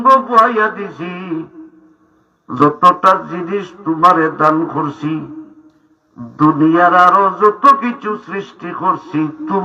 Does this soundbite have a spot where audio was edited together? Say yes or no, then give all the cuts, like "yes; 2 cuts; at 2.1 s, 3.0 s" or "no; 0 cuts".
yes; 1 cut; at 2.6 s